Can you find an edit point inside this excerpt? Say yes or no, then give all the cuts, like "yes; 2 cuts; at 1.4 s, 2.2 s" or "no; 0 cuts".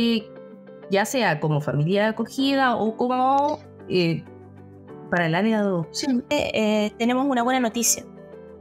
yes; 1 cut; at 6.3 s